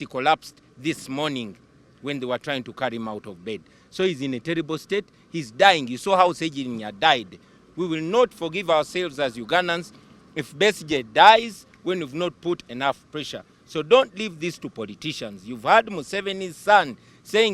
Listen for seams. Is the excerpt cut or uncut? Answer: uncut